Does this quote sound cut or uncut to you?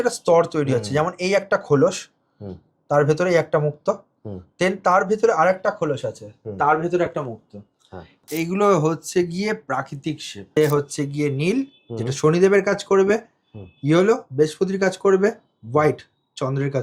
cut